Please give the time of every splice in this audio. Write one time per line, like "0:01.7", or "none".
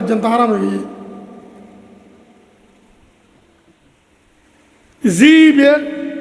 none